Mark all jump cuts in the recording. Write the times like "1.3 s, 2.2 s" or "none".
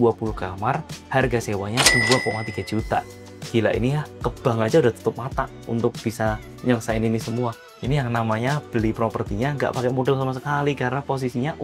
7.7 s